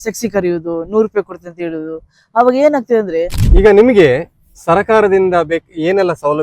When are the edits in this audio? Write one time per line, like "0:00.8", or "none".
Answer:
0:03.4